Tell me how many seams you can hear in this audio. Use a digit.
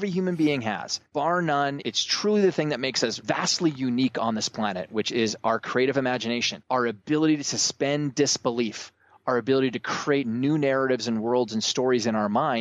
4